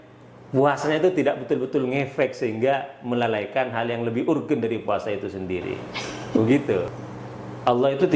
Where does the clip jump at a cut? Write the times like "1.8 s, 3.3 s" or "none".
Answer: 6.9 s